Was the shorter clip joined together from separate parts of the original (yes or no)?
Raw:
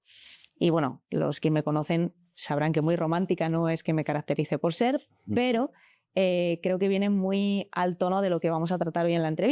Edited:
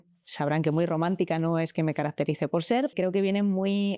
yes